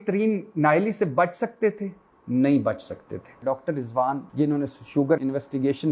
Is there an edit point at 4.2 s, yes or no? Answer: yes